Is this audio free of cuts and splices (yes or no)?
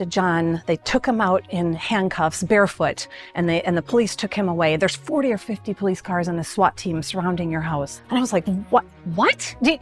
no